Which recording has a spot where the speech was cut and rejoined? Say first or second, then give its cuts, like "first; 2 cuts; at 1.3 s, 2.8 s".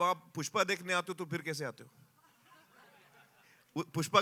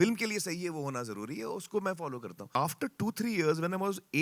second; 1 cut; at 2.5 s